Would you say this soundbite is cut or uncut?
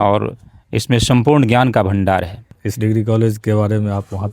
cut